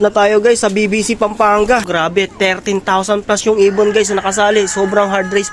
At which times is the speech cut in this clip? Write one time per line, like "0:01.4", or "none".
0:01.9